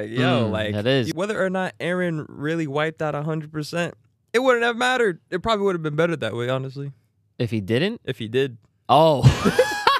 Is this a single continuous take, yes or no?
no